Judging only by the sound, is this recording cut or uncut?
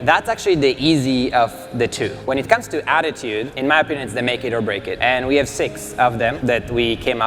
cut